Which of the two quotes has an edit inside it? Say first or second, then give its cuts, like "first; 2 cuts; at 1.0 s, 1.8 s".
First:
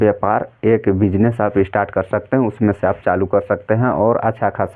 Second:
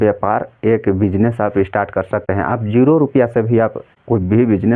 second; 2 cuts; at 2.2 s, 3.9 s